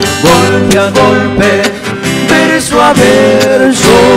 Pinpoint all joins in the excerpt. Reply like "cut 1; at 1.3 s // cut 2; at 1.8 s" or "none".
none